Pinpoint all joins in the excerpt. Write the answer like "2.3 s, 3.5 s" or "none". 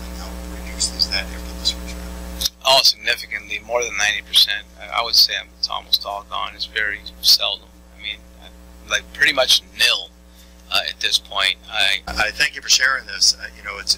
12.1 s